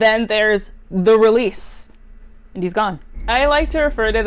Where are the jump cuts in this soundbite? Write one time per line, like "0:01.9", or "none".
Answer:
0:03.1